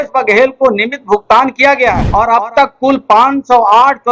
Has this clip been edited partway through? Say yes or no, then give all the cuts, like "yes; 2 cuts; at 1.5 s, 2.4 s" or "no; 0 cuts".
yes; 1 cut; at 2.0 s